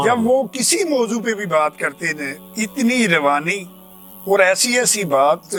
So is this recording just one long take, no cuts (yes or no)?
yes